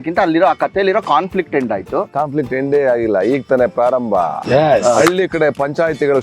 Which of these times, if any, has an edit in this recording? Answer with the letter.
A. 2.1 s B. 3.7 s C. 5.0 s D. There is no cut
A